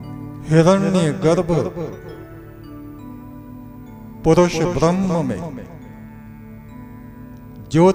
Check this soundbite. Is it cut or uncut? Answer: uncut